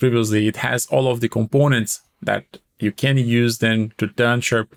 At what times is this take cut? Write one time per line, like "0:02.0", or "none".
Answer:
none